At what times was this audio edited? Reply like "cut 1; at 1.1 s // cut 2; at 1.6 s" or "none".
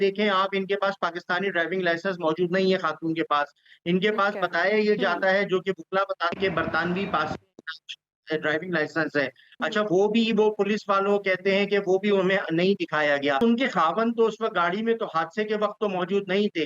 cut 1; at 13.4 s